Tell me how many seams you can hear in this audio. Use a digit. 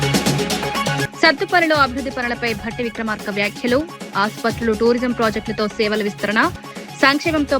1